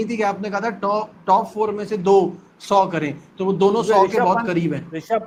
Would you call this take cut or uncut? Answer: uncut